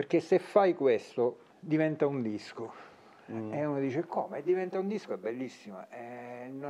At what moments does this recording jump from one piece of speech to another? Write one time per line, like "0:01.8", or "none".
0:01.5